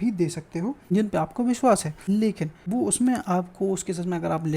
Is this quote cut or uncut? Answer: cut